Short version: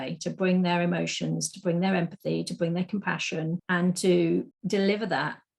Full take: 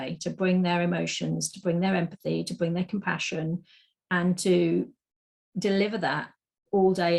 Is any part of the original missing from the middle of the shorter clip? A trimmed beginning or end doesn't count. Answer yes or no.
yes